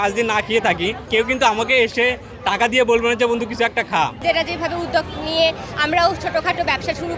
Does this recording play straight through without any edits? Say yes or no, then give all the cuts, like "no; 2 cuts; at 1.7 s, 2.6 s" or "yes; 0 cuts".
no; 2 cuts; at 1.0 s, 4.2 s